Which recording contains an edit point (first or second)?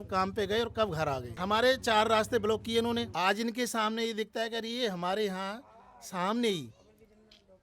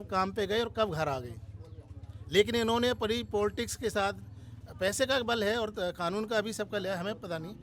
first